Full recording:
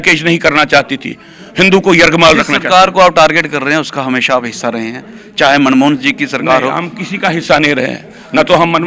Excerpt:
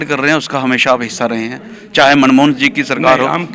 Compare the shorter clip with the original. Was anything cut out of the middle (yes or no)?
no